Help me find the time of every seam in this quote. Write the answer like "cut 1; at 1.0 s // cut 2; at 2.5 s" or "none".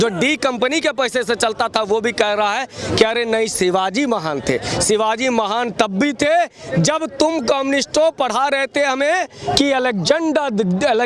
none